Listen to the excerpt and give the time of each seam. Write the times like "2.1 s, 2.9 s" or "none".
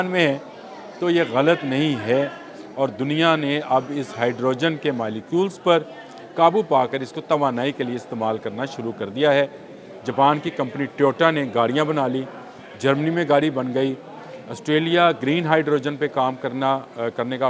none